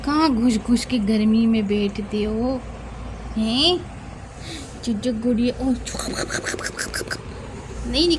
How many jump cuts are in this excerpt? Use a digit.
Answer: 0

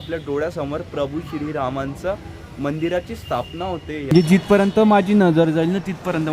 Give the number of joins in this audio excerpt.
1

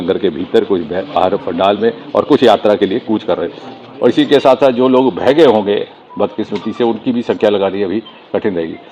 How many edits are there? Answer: 0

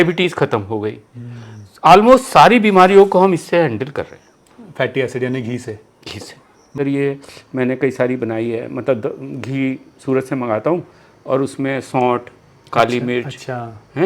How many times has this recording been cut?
1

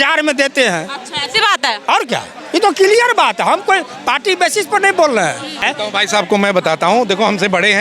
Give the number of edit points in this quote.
1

